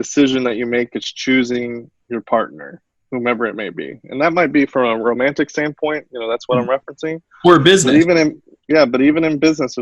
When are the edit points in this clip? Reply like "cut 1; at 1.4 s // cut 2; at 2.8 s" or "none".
none